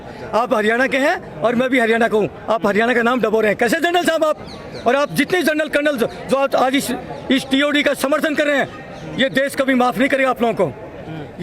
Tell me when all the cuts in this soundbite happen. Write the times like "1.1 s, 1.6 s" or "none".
none